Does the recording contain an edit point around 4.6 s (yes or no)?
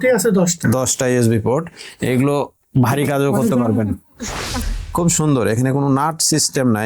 yes